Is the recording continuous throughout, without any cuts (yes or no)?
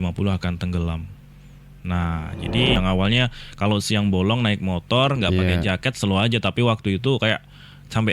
no